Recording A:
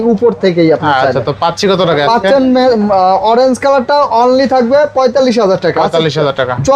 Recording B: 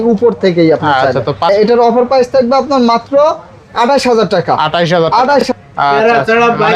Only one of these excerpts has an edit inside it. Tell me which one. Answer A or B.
B